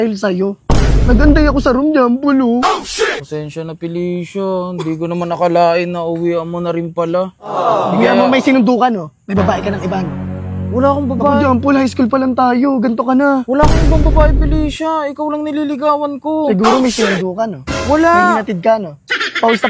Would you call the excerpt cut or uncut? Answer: uncut